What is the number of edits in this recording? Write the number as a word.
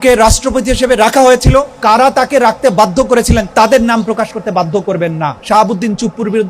three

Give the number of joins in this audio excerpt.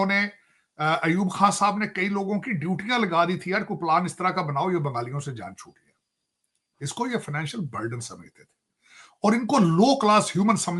zero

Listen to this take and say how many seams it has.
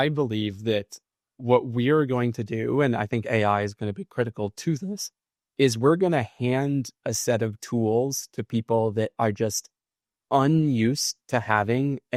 zero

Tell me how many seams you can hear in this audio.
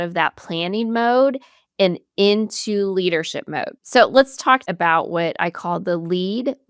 two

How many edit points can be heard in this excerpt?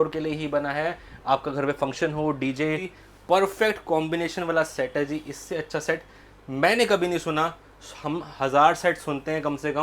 one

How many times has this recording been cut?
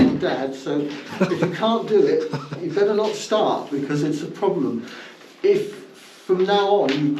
zero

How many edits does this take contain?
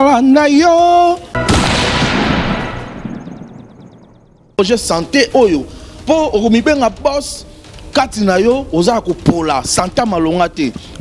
one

